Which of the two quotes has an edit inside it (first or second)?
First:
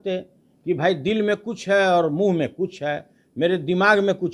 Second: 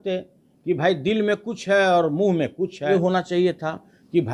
second